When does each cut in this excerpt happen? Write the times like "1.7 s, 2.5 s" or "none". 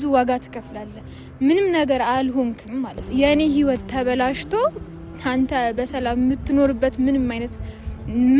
3.1 s